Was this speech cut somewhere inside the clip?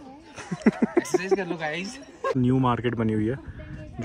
yes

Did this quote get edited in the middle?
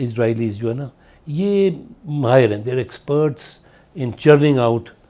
no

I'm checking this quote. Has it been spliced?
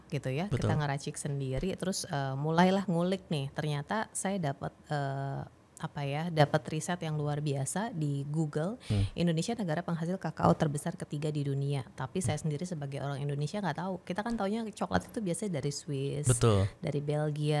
no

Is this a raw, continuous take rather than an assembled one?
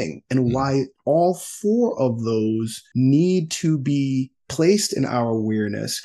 no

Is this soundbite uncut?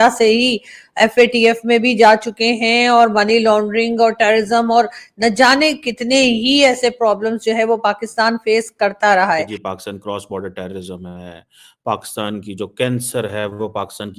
no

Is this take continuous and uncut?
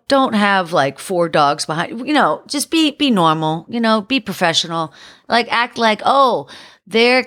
yes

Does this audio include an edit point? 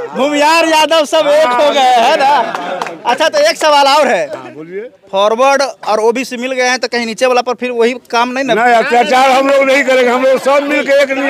no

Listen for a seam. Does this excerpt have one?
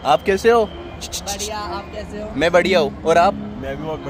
no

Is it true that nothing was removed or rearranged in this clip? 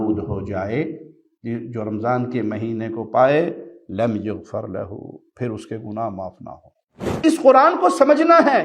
no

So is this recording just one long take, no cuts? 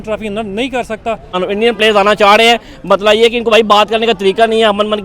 no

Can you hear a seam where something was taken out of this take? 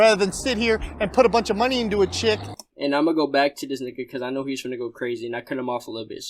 no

